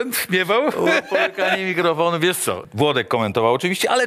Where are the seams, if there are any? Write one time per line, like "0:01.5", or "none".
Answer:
0:02.6